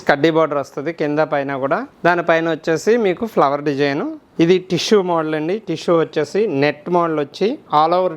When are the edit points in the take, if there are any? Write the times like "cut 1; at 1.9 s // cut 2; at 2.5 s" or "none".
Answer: cut 1; at 1.9 s // cut 2; at 4.1 s